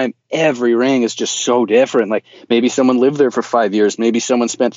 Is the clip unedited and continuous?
yes; 0 cuts

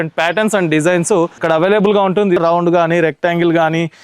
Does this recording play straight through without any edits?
no; 2 cuts; at 1.4 s, 2.4 s

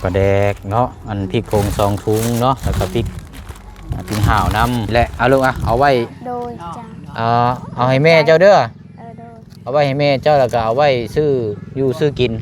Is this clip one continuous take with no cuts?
no; 1 cut; at 4.9 s

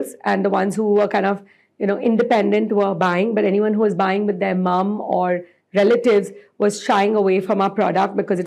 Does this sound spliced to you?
no; 0 cuts

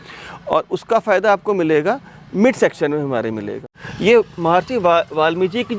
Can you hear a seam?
yes; 1 cut; at 3.7 s

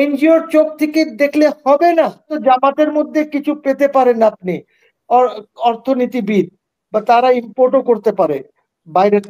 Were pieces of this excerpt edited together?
yes; 1 cut; at 2.3 s

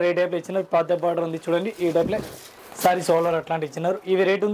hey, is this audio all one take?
yes; 0 cuts

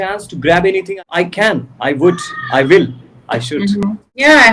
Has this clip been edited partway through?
yes; 2 cuts; at 0.9 s, 3.8 s

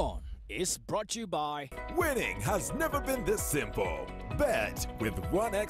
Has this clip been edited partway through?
no; 0 cuts

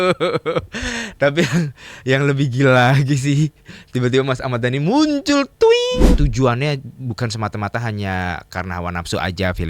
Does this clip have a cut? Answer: yes; 1 cut; at 6.1 s

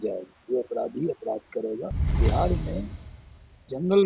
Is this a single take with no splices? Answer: no; 1 cut; at 2.0 s

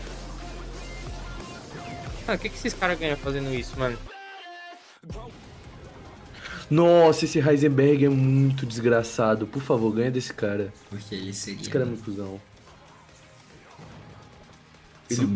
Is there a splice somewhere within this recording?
yes; 1 cut; at 5.3 s

